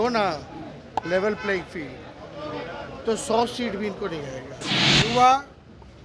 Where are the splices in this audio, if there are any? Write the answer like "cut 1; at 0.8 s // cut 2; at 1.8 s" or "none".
cut 1; at 4.7 s